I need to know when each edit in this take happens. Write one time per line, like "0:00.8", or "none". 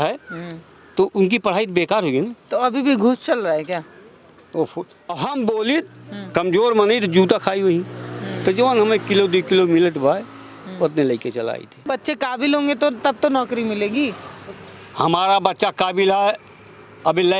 0:05.1
0:11.9